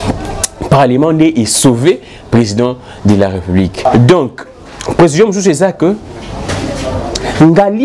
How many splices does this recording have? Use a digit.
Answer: 1